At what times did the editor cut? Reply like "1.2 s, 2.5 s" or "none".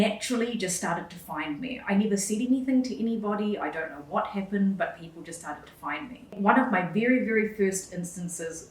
6.4 s